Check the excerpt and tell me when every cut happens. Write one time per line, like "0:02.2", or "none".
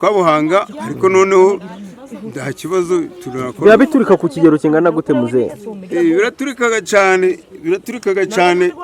none